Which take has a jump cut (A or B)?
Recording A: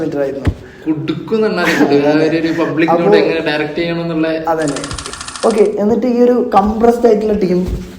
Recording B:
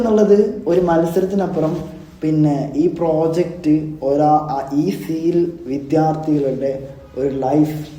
A